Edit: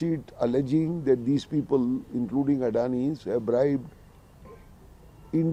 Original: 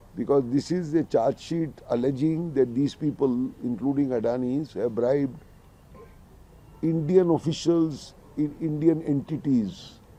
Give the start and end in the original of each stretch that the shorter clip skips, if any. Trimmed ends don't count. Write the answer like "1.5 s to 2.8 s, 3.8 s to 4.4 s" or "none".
none